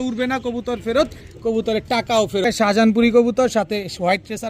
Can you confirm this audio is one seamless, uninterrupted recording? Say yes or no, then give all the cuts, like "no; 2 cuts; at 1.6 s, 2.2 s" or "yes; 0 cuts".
no; 1 cut; at 2.4 s